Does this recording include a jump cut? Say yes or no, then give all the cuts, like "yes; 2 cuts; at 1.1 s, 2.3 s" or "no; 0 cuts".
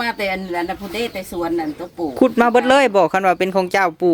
no; 0 cuts